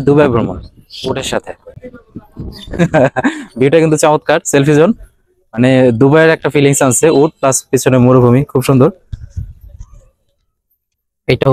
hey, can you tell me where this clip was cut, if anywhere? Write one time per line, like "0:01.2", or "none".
none